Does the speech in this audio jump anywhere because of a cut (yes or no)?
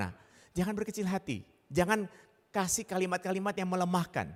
no